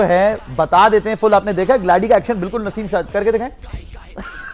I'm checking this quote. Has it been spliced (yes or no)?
no